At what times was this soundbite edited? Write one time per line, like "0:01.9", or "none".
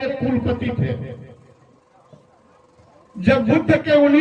0:01.8